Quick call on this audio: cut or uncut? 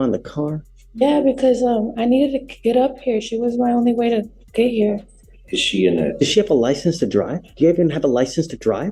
uncut